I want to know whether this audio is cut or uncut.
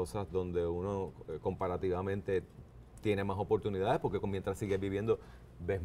uncut